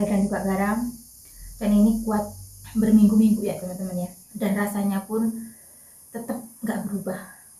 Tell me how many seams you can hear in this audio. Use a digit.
1